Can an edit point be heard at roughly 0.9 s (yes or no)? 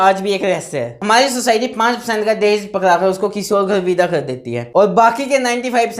yes